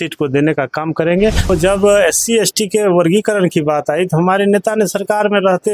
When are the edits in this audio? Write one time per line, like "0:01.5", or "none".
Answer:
0:01.5